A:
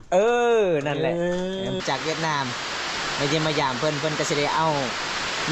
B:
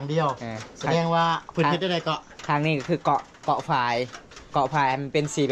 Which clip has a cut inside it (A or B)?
A